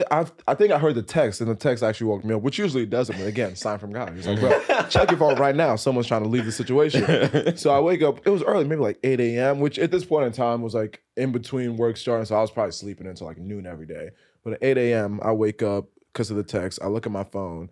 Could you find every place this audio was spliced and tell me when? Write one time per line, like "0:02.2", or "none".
none